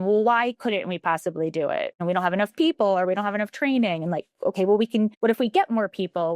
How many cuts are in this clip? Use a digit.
2